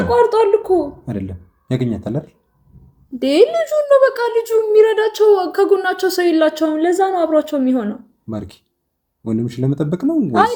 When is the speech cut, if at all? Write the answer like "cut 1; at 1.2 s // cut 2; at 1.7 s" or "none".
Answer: none